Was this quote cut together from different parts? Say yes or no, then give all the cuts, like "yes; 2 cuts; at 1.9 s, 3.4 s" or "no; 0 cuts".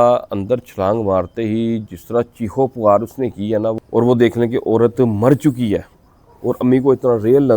yes; 1 cut; at 3.8 s